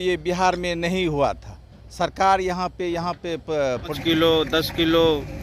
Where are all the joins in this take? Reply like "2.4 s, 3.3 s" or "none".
3.8 s